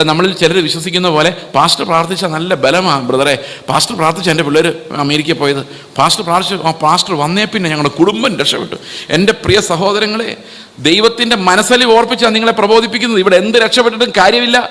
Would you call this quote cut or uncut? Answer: uncut